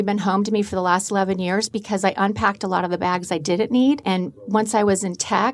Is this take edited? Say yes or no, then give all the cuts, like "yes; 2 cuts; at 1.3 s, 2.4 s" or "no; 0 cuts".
yes; 1 cut; at 4.0 s